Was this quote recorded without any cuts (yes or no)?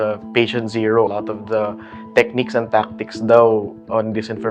no